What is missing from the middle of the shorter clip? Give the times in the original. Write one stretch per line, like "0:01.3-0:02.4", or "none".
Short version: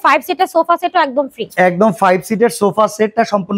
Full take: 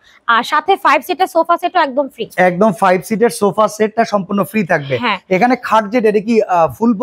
none